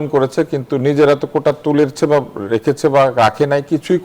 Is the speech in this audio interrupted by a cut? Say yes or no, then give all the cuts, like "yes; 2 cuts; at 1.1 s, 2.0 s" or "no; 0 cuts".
no; 0 cuts